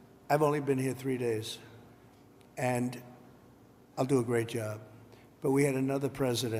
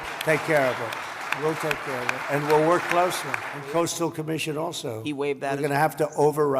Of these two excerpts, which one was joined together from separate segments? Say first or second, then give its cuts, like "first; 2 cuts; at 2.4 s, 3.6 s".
second; 1 cut; at 3.6 s